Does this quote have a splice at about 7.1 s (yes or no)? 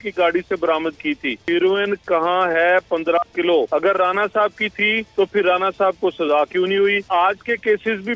yes